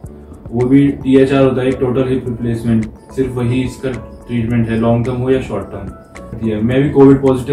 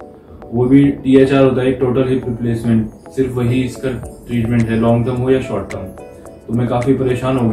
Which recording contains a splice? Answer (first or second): first